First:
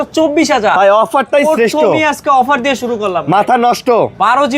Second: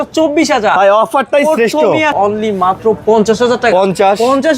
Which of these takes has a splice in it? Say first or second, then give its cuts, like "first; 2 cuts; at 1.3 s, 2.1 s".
second; 1 cut; at 2.1 s